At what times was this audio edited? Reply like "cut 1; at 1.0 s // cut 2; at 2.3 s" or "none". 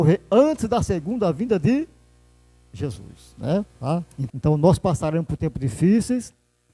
cut 1; at 3.7 s